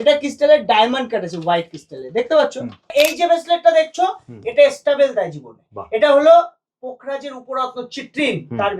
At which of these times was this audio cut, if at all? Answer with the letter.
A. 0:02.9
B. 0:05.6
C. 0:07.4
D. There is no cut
A